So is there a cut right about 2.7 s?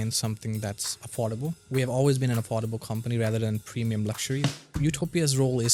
no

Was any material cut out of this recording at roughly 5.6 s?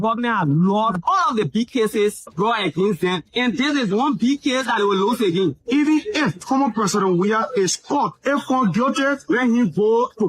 yes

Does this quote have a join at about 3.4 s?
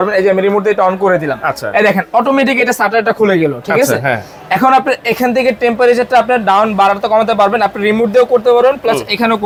no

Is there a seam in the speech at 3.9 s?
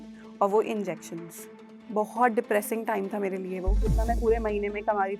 yes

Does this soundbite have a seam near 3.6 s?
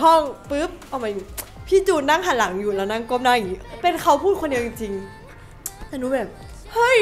yes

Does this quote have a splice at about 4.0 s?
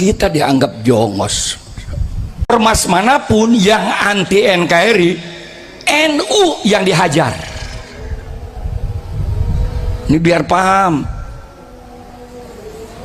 no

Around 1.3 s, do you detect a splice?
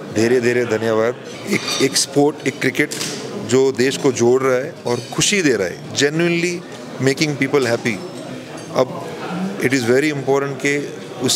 yes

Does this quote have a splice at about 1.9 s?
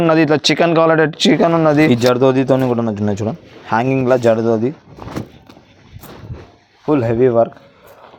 yes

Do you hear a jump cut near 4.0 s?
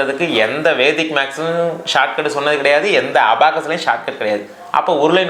no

